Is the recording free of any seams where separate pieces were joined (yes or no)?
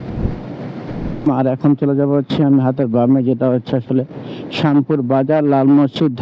no